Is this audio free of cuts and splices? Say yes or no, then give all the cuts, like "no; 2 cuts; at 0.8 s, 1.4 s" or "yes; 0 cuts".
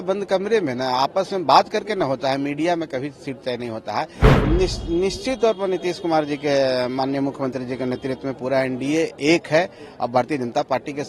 no; 1 cut; at 4.3 s